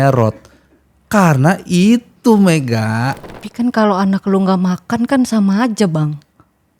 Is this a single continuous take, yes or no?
no